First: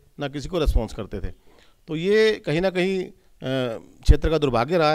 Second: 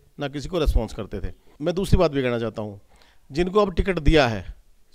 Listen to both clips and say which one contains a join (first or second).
second